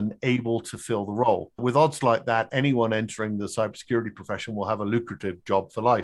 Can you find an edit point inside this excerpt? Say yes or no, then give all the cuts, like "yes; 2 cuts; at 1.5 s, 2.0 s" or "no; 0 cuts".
no; 0 cuts